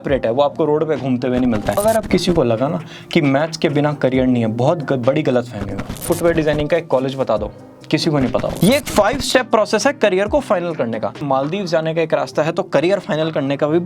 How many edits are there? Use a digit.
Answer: 4